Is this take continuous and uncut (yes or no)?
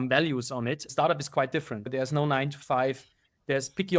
no